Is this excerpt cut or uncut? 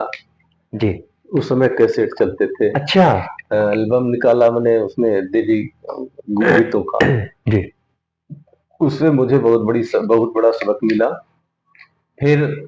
uncut